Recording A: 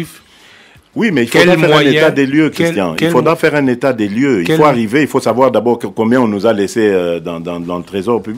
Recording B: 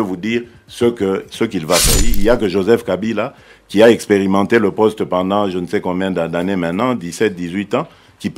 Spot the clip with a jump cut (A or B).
B